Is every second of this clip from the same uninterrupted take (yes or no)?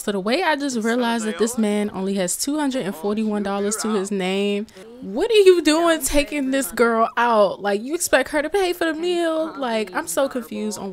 yes